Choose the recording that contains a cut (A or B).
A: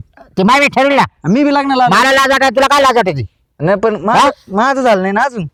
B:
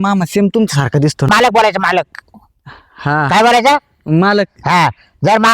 B